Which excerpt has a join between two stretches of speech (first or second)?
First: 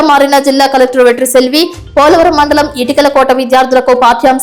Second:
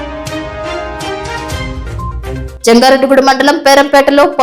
second